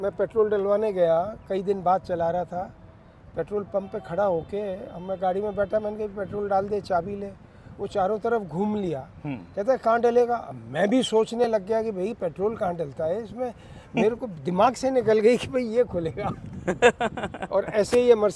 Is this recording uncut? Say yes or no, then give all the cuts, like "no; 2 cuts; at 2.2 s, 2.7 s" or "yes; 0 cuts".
yes; 0 cuts